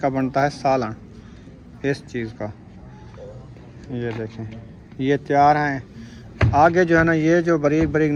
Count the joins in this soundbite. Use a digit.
0